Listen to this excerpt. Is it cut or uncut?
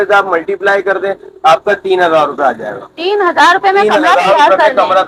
uncut